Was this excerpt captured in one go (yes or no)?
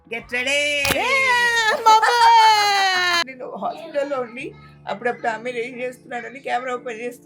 no